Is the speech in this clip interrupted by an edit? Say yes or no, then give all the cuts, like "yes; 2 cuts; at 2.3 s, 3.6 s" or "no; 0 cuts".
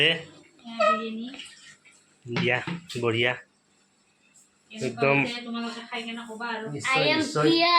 no; 0 cuts